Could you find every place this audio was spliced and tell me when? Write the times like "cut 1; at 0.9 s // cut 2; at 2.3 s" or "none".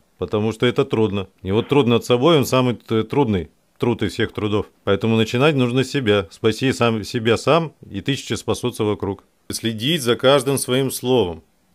cut 1; at 1.3 s // cut 2; at 4.7 s // cut 3; at 9.5 s